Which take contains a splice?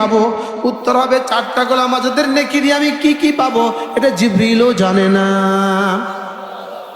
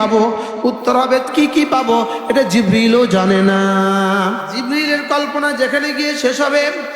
second; 2 cuts; at 1.3 s, 4.5 s

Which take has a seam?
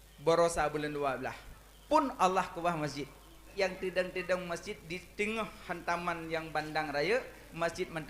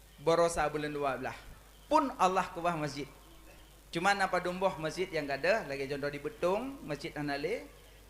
first; 1 cut; at 3.4 s

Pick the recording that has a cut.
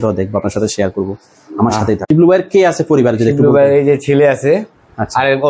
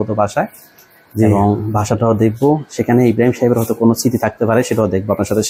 first; 1 cut; at 2.0 s

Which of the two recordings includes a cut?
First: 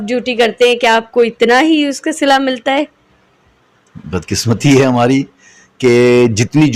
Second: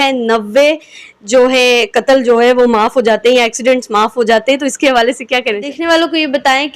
second; 1 cut; at 5.7 s

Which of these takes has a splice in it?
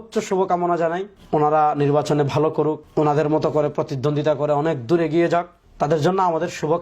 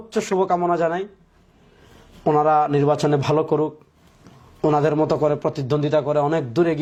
first; 3 cuts; at 1.1 s, 2.8 s, 5.6 s

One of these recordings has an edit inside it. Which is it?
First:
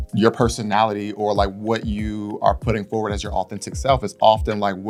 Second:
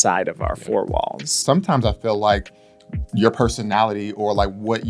second; 1 cut; at 1.4 s

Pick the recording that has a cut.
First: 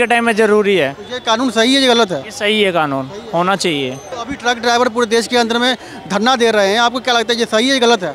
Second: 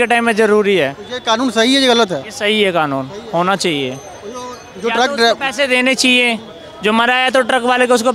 first; 1 cut; at 4.1 s

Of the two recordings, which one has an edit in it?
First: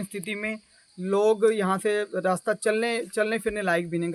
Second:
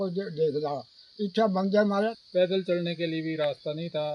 second; 1 cut; at 2.1 s

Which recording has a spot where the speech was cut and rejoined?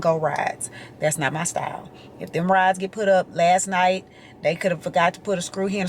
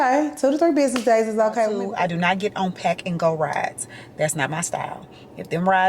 second; 1 cut; at 1.8 s

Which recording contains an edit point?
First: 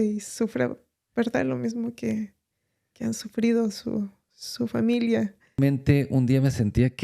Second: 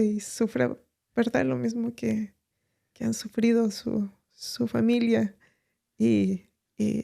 first; 1 cut; at 5.6 s

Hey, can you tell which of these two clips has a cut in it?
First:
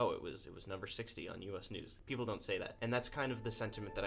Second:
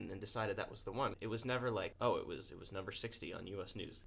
second; 1 cut; at 1.1 s

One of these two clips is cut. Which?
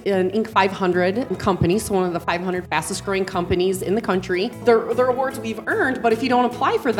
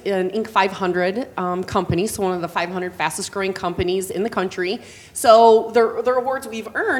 first; 2 cuts; at 1.3 s, 4.6 s

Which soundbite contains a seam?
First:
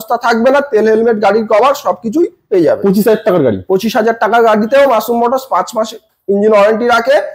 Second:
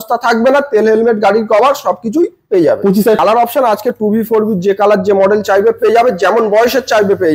second; 1 cut; at 3.2 s

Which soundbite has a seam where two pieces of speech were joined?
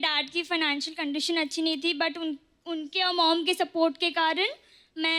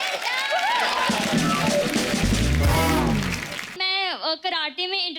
second; 1 cut; at 3.7 s

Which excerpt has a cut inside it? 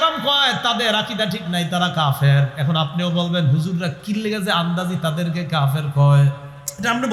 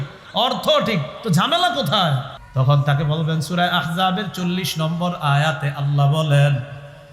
second; 1 cut; at 2.4 s

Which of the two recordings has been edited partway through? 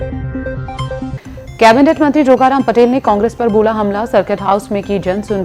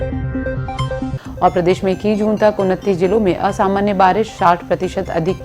second; 1 cut; at 1.1 s

